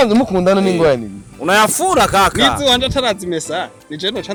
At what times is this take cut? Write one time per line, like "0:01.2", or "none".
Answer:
none